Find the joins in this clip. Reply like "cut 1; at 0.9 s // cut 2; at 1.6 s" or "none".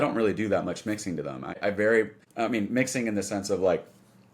cut 1; at 1.6 s // cut 2; at 2.2 s